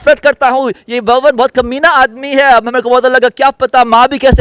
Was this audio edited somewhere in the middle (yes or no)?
no